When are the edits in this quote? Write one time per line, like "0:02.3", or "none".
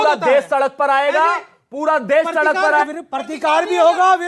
0:02.9